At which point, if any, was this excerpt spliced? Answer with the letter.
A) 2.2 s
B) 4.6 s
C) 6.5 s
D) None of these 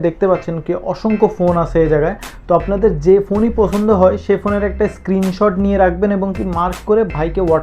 D